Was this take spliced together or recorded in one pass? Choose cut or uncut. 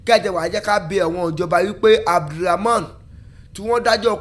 uncut